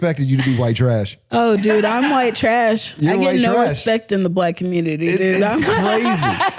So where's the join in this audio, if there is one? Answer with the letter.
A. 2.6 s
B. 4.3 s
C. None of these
C